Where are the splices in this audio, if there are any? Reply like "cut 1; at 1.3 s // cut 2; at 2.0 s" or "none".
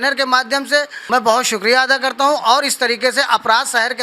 cut 1; at 1.0 s